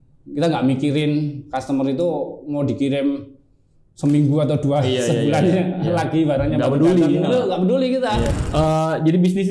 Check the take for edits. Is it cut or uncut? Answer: cut